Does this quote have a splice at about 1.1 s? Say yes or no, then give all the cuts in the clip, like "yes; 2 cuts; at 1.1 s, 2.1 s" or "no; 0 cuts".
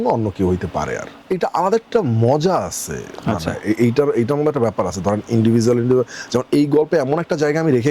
yes; 1 cut; at 1.1 s